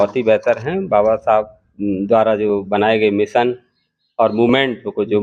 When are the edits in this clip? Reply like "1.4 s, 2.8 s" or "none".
none